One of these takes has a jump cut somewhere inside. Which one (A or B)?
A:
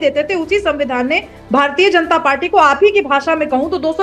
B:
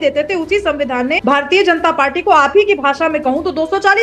B